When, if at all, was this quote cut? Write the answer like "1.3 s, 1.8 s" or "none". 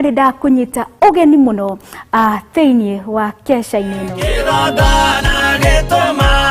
5.0 s